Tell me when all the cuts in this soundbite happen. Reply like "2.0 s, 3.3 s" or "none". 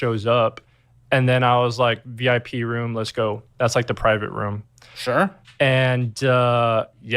1.7 s